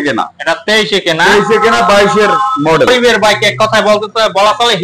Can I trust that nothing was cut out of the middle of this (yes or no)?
no